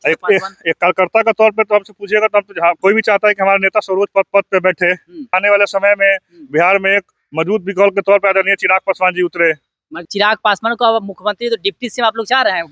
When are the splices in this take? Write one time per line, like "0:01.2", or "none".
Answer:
0:05.4
0:10.0